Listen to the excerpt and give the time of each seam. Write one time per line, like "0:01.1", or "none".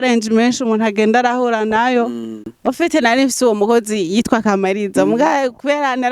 0:02.5